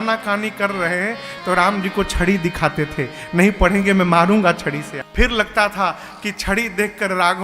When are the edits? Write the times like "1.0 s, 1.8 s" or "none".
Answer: 5.0 s